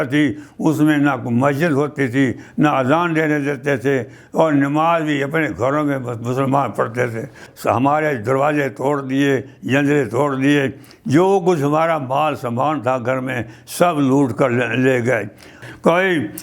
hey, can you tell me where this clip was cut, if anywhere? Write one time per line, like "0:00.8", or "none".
0:07.5
0:15.6

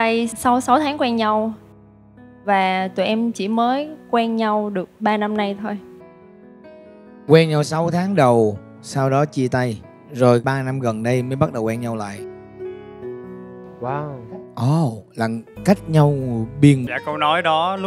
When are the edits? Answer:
0:16.8

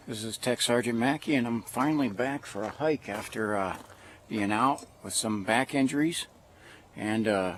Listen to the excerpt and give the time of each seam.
none

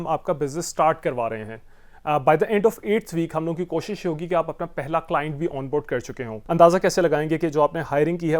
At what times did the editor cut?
0:06.4

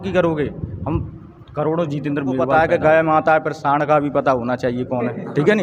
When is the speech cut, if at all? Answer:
0:02.5

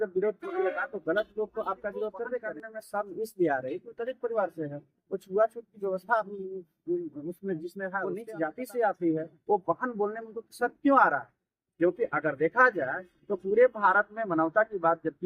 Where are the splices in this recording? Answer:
0:02.7
0:08.2

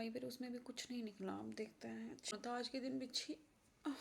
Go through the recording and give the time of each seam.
0:02.7

